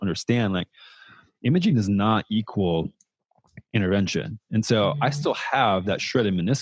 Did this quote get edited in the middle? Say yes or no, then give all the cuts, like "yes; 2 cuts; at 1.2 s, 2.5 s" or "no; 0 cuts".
no; 0 cuts